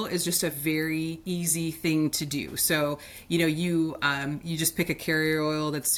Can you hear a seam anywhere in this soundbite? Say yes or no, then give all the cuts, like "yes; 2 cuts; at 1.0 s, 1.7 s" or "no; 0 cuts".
no; 0 cuts